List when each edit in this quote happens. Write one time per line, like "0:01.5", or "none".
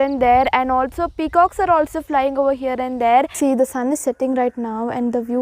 0:03.3